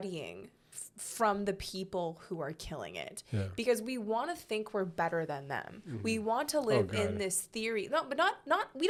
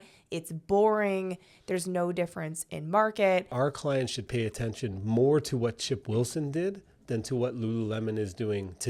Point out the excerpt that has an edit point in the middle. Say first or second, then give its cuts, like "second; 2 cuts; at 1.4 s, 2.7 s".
second; 1 cut; at 3.5 s